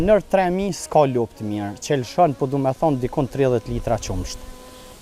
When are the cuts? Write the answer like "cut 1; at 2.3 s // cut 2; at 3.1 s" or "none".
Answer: none